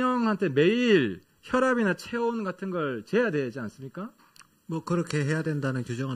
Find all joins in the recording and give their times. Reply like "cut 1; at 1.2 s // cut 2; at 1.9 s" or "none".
none